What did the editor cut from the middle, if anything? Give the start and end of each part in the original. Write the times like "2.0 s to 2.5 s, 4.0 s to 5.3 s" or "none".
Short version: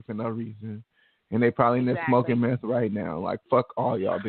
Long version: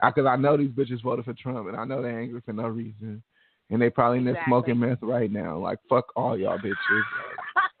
none